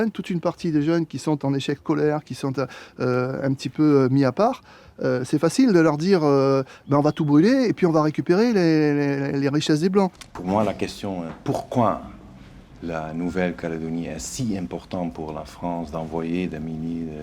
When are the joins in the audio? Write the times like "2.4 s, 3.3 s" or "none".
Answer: 10.2 s

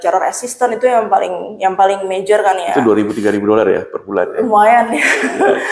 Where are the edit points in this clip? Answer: none

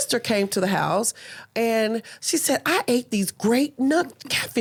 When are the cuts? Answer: none

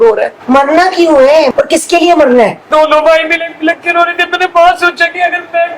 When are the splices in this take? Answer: 1.5 s, 2.7 s

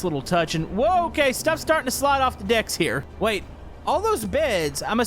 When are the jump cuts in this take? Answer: 3.1 s

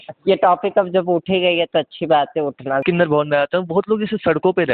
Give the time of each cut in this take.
2.8 s

